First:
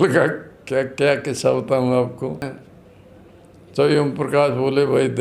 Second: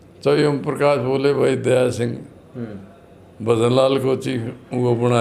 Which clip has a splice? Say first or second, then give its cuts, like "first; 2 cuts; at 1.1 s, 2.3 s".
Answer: first; 1 cut; at 2.4 s